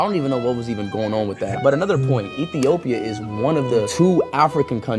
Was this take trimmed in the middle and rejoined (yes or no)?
no